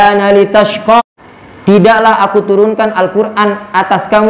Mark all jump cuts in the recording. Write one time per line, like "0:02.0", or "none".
0:01.0